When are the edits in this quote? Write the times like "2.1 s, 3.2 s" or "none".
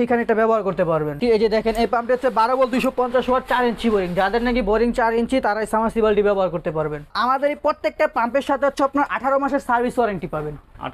1.1 s, 7.1 s